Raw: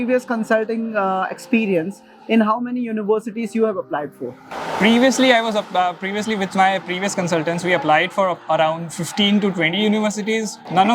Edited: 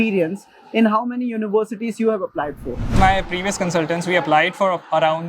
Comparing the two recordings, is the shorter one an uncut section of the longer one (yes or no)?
no